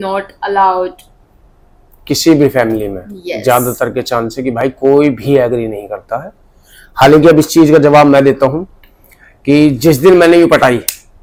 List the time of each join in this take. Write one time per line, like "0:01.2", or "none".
none